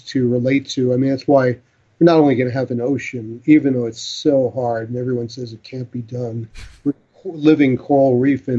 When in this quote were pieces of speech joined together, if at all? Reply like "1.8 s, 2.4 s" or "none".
7.1 s